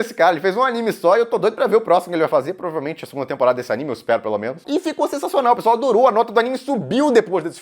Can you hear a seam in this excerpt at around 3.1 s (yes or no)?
no